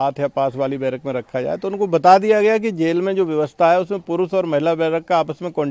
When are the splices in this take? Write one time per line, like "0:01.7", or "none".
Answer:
none